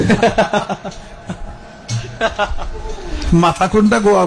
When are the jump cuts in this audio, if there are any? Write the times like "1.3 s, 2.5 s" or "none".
none